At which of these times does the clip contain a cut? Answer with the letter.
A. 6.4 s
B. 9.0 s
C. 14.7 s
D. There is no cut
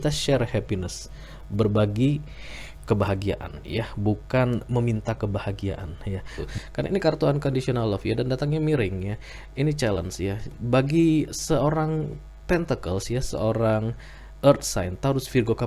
A